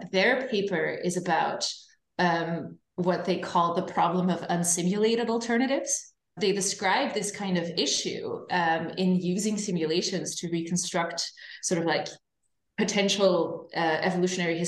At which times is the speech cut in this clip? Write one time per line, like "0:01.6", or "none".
0:06.3